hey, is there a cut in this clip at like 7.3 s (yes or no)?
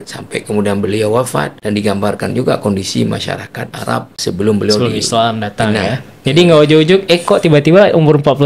no